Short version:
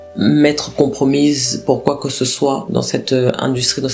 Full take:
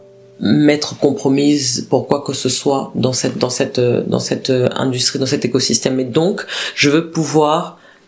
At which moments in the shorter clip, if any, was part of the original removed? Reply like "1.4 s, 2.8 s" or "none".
2.7 s